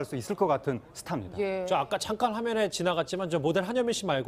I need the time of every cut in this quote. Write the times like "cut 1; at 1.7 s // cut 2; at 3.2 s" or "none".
none

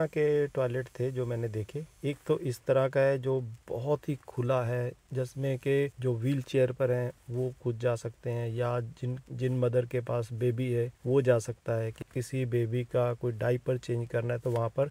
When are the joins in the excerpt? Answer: none

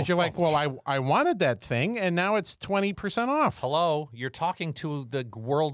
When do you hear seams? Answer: none

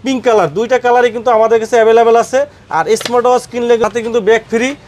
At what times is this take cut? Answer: cut 1; at 3.9 s

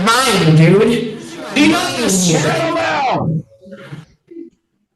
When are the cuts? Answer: cut 1; at 1.9 s

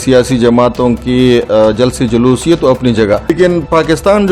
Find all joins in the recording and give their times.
cut 1; at 3.3 s

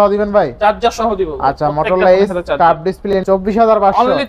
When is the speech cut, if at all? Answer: cut 1; at 3.1 s

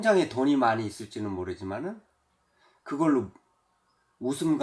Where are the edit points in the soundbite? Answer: none

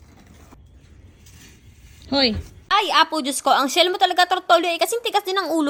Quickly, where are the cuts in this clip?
none

